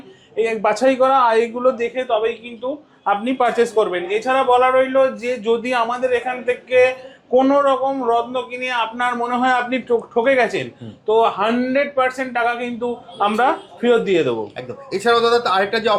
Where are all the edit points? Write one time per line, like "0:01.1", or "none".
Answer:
none